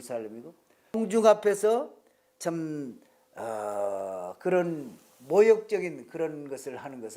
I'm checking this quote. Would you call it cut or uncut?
cut